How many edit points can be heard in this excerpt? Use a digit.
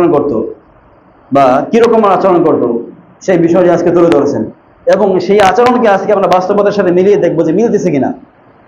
0